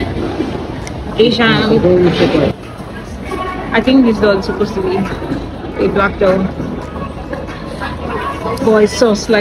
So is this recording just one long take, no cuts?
no; 1 cut; at 2.6 s

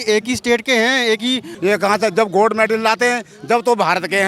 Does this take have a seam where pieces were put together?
yes; 1 cut; at 1.5 s

